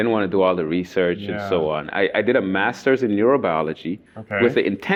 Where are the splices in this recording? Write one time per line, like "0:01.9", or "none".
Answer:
none